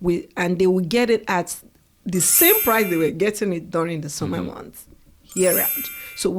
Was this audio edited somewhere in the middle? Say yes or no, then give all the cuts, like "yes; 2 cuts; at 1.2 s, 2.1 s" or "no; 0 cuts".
no; 0 cuts